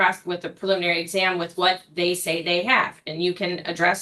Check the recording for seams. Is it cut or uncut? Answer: uncut